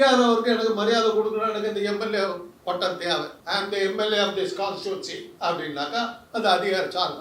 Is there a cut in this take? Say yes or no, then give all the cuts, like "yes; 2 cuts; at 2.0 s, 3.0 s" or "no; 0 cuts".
yes; 1 cut; at 3.4 s